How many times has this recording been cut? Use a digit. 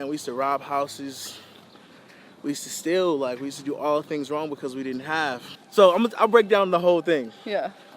1